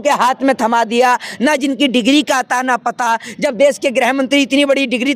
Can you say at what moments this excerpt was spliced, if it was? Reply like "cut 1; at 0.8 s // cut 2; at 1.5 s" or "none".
none